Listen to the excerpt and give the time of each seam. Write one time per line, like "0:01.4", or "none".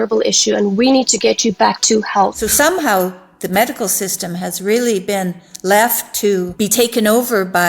0:02.4
0:06.5